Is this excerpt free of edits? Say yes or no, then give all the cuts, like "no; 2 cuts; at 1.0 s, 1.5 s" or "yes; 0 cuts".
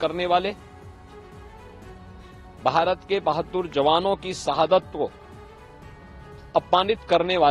yes; 0 cuts